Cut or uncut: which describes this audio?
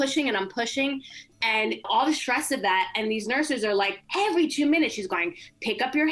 cut